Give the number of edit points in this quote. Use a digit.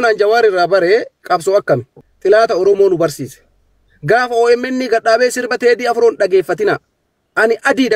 1